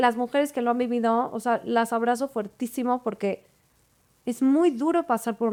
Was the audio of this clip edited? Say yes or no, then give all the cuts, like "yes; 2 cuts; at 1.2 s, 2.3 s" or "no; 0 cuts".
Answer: no; 0 cuts